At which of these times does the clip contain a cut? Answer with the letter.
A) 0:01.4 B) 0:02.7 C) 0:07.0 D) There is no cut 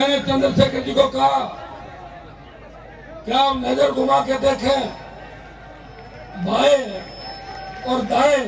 D